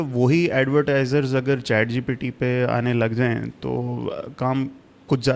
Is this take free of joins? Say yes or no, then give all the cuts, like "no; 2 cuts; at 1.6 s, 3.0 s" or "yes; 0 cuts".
yes; 0 cuts